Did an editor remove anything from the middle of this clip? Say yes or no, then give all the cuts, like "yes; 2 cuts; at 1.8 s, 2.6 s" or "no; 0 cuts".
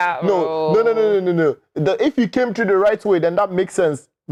no; 0 cuts